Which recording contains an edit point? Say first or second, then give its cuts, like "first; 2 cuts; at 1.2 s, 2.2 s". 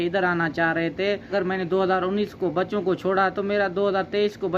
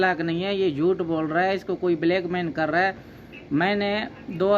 first; 1 cut; at 1.3 s